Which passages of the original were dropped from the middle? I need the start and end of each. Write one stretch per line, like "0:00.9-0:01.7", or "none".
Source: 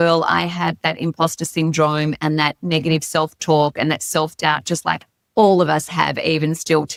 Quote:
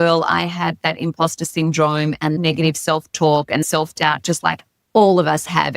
0:02.4-0:02.6
0:03.9-0:04.1